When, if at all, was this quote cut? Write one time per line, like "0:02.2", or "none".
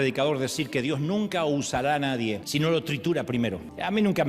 0:02.4